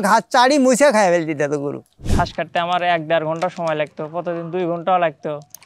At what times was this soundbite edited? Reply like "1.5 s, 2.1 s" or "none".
2.0 s